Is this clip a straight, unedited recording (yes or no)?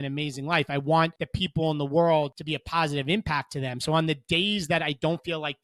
no